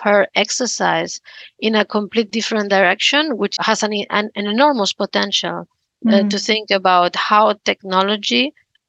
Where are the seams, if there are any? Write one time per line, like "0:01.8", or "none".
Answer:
none